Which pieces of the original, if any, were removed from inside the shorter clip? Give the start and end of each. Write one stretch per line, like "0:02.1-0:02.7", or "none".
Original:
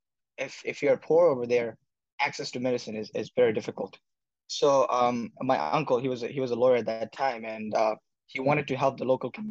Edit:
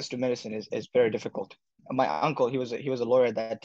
0:04.2-0:05.3